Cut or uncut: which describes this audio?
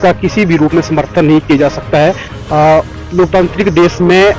uncut